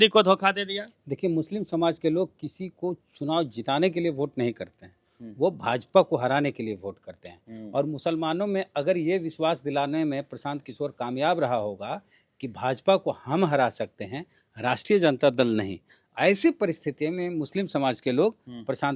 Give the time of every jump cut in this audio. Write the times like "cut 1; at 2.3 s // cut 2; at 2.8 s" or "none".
none